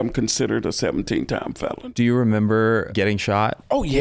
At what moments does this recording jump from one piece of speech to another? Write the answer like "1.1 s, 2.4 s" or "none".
1.8 s, 3.0 s